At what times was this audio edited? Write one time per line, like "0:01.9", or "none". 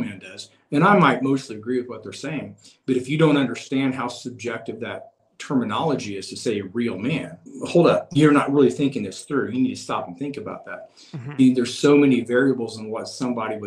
0:05.2
0:07.4